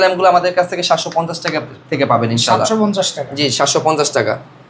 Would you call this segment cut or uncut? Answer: uncut